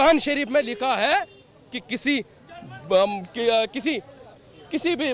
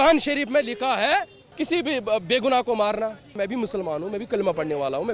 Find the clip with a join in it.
second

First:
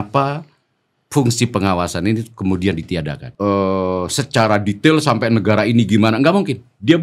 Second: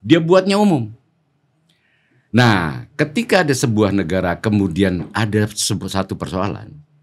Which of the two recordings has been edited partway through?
first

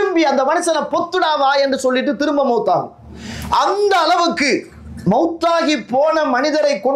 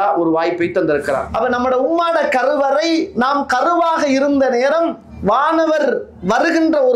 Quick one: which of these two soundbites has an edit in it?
second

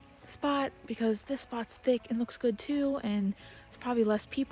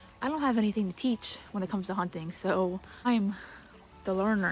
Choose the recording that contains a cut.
second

